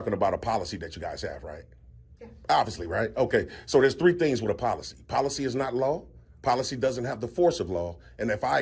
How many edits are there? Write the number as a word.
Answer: zero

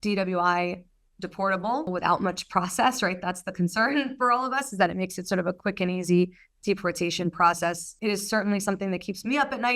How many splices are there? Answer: two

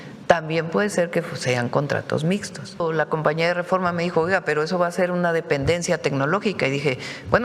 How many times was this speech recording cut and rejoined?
one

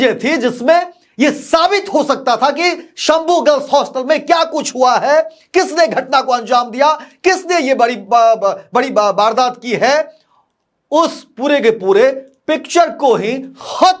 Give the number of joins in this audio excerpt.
zero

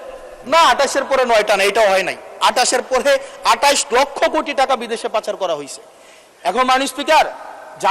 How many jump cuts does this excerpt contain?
zero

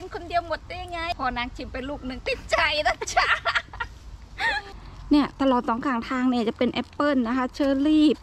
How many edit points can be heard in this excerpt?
two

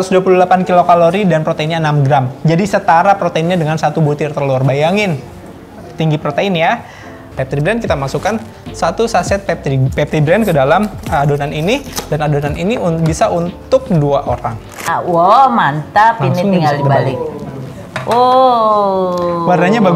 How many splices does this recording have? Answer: two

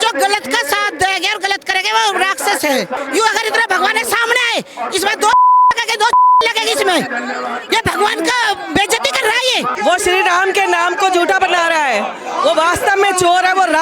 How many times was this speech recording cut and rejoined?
two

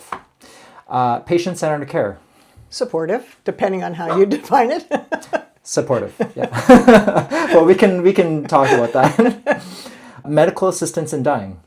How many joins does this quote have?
zero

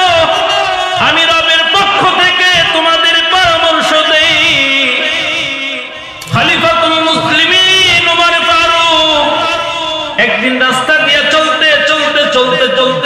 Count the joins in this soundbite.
one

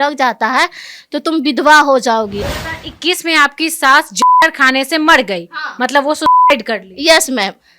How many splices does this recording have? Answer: one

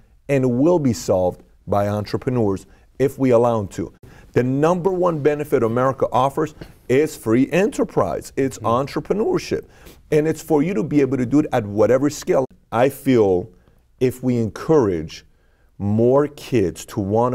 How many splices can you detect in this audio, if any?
two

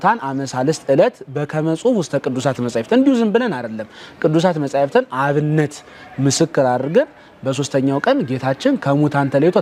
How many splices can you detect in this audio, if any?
zero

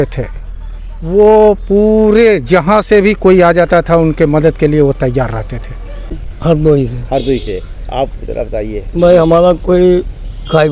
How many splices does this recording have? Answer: one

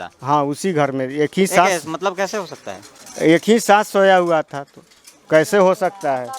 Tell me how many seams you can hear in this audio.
zero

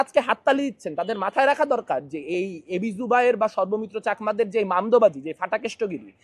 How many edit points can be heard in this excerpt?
zero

